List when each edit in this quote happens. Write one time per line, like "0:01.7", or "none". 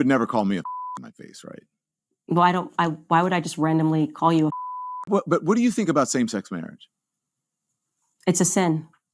0:05.1

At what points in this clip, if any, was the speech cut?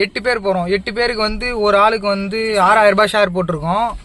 none

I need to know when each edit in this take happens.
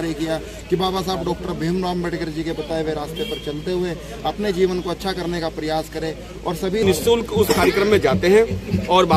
0:06.8

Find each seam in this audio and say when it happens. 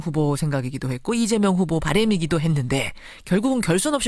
0:01.2

